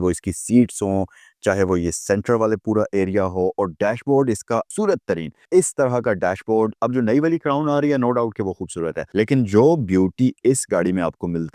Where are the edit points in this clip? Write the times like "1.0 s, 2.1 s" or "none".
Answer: 9.0 s